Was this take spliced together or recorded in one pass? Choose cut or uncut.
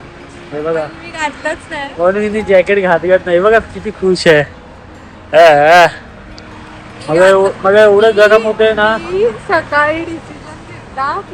uncut